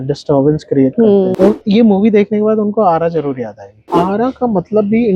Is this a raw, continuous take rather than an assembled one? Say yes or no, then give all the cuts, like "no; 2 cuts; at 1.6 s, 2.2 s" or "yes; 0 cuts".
no; 2 cuts; at 1.3 s, 3.8 s